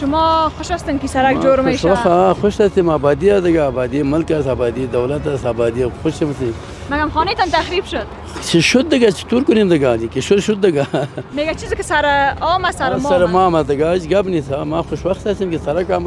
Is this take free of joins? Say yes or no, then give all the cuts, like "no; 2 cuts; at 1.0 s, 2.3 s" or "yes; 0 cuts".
yes; 0 cuts